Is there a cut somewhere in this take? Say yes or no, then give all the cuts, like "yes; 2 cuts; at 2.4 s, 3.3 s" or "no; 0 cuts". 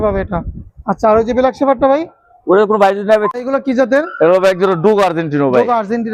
yes; 1 cut; at 3.3 s